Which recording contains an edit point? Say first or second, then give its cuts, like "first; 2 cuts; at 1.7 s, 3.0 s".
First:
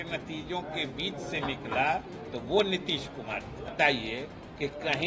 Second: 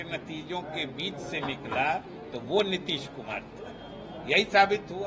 first; 1 cut; at 3.7 s